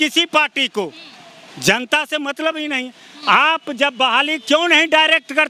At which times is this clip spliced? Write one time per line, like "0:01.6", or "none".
none